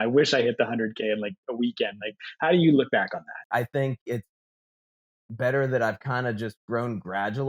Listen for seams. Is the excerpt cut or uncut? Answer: cut